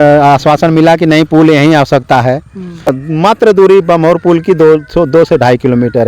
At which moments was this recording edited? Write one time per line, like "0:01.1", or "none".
0:02.9